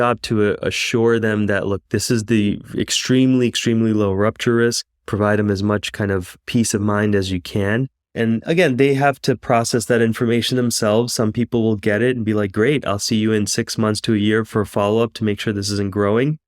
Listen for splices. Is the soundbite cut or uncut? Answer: cut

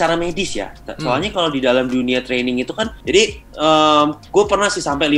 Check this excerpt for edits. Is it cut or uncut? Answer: cut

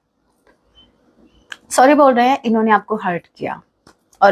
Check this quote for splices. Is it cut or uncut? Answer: uncut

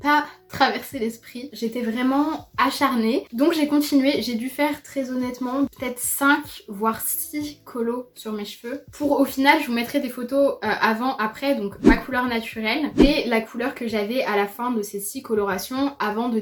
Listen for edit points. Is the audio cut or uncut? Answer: uncut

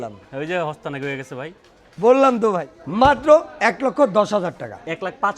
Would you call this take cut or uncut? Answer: cut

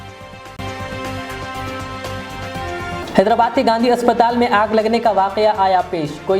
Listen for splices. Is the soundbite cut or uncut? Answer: cut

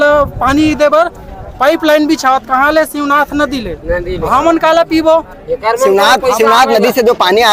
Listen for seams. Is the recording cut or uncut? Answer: uncut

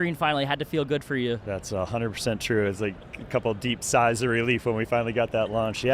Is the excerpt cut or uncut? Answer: cut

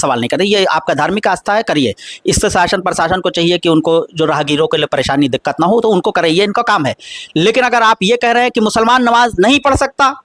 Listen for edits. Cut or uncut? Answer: uncut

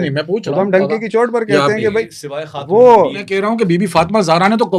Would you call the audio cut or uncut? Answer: cut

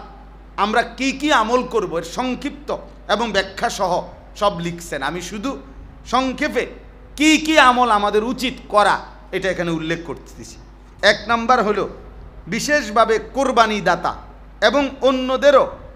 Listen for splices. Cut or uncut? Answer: uncut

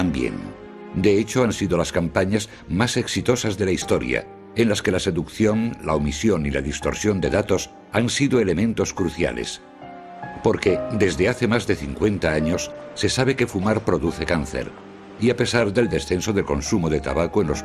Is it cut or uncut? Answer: uncut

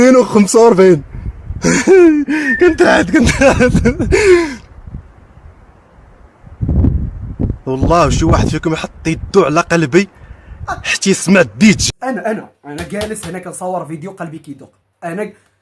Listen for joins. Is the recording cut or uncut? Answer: cut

